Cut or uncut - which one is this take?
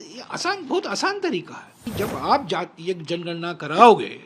cut